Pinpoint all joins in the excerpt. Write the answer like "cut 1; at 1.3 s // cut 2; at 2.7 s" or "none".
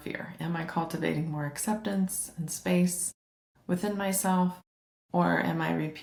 none